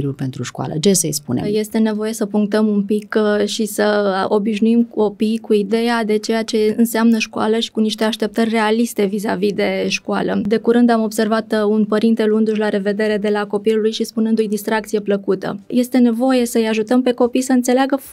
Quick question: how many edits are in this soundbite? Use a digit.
3